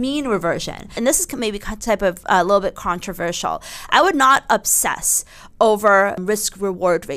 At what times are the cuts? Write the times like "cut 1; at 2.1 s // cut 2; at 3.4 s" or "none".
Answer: cut 1; at 0.9 s // cut 2; at 6.2 s